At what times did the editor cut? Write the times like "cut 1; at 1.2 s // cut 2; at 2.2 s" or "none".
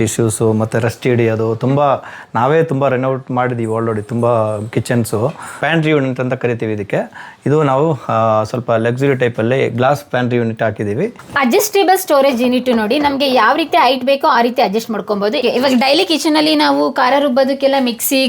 cut 1; at 5.6 s // cut 2; at 11.3 s // cut 3; at 15.4 s